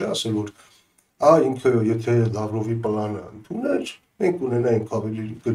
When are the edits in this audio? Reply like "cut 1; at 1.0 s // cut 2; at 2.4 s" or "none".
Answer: none